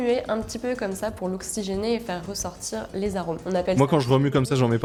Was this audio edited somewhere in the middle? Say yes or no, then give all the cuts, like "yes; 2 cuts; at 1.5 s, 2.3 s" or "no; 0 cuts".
no; 0 cuts